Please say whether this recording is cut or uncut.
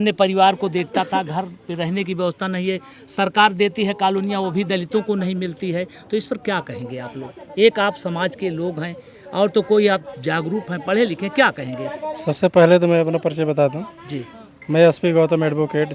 uncut